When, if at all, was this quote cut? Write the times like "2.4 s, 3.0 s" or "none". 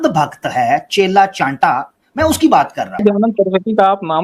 3.0 s